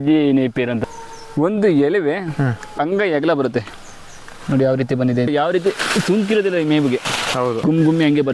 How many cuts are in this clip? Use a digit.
4